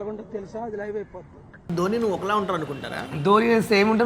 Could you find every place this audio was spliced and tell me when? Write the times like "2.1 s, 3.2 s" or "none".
1.7 s

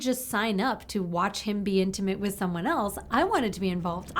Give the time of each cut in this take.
none

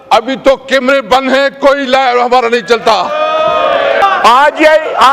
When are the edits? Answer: 4.0 s

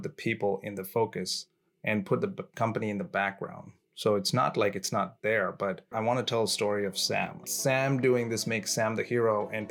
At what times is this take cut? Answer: 5.9 s, 7.5 s

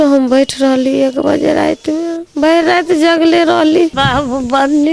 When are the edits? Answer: 3.9 s

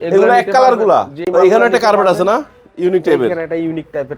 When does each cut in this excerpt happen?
1.2 s

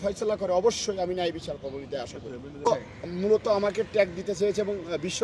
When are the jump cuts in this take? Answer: 2.3 s

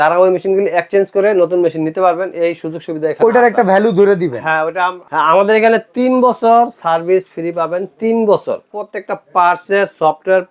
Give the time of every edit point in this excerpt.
5.0 s, 8.7 s

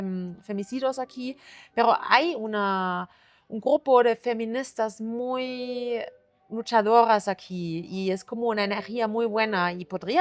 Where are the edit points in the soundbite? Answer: none

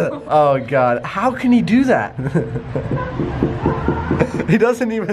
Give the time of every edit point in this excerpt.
none

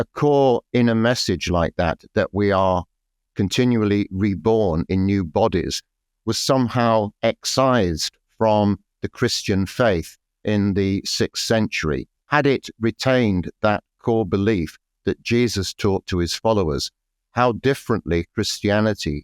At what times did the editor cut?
10.4 s, 12.2 s

